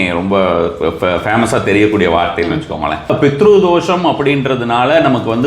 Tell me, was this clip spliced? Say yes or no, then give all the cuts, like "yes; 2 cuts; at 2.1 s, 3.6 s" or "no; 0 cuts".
yes; 1 cut; at 3.1 s